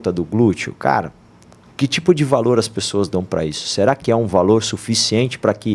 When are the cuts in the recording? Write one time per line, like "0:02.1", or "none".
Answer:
none